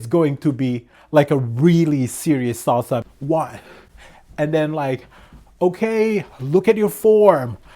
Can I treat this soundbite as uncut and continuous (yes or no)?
no